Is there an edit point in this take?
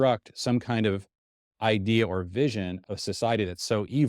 yes; 1 cut; at 2.8 s

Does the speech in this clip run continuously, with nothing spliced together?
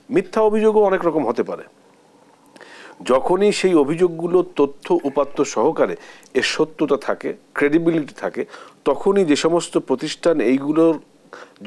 yes; 0 cuts

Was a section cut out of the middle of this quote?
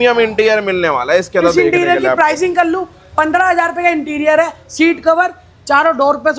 no; 0 cuts

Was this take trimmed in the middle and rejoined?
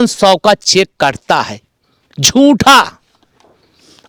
no; 0 cuts

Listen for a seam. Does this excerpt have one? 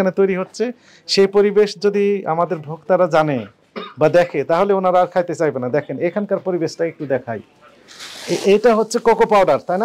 no; 0 cuts

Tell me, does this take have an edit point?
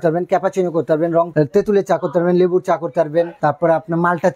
yes; 2 cuts; at 1.3 s, 3.3 s

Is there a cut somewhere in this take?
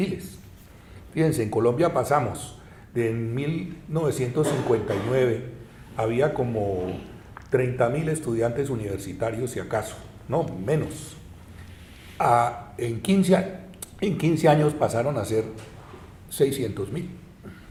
no; 0 cuts

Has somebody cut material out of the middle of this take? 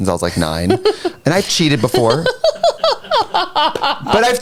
no; 0 cuts

